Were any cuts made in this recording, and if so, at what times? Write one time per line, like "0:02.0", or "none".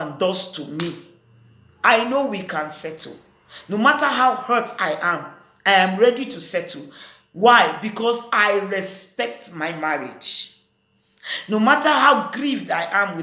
none